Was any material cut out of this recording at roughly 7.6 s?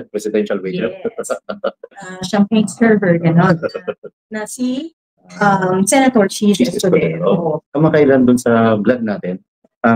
yes; 1 cut; at 7.6 s

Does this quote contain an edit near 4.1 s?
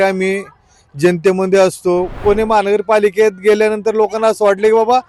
no; 1 cut; at 2.2 s

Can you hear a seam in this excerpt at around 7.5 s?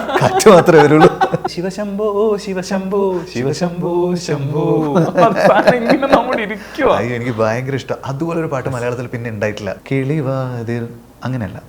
no; 2 cuts; at 1.5 s, 9.8 s

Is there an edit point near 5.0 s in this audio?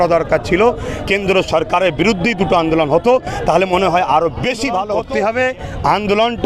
yes; 1 cut; at 5.0 s

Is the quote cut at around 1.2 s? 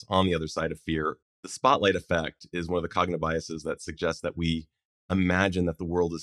yes; 1 cut; at 1.2 s

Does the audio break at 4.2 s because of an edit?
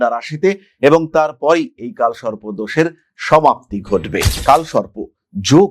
yes; 1 cut; at 4.2 s

